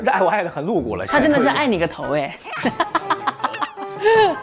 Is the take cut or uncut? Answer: uncut